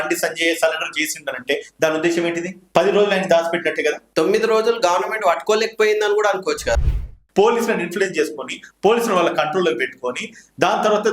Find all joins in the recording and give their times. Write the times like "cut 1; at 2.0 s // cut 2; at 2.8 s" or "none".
cut 1; at 2.6 s // cut 2; at 4.0 s // cut 3; at 6.8 s